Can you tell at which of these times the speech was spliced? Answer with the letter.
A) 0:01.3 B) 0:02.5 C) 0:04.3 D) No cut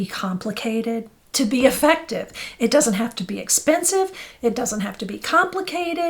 D